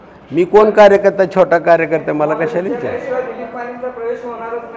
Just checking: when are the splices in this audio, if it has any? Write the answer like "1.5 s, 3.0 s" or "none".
none